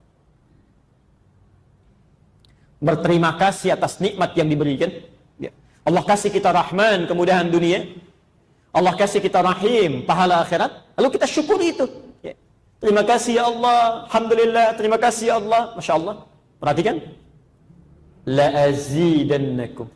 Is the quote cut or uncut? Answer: uncut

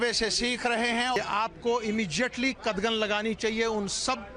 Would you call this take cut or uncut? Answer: cut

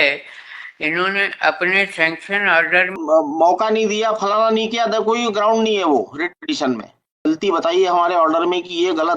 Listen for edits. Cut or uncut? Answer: cut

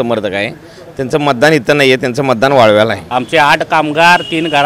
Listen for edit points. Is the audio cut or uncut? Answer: cut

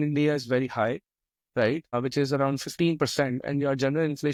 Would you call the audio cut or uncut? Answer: uncut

